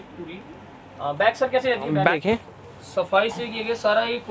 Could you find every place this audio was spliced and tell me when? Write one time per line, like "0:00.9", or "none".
0:02.1